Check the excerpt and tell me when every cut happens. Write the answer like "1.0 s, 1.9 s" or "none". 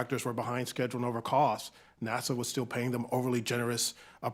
none